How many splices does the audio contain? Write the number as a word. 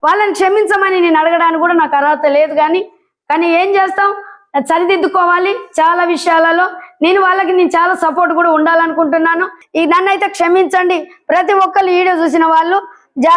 one